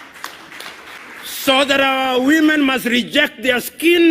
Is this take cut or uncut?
cut